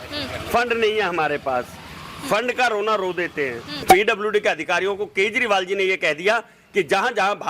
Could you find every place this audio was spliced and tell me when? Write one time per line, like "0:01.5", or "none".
0:03.8